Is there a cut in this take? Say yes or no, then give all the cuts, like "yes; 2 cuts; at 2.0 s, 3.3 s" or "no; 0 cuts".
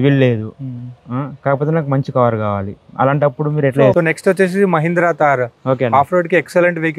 yes; 1 cut; at 3.9 s